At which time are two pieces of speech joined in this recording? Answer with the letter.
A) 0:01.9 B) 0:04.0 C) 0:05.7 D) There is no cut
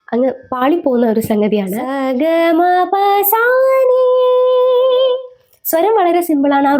A